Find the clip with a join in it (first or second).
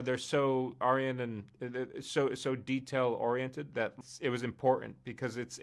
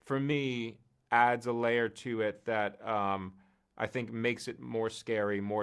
first